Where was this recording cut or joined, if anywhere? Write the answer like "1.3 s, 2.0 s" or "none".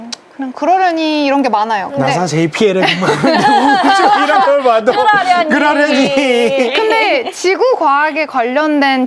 none